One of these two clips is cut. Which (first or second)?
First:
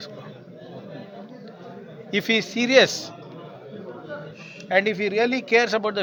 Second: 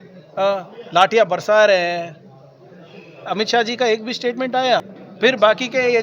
second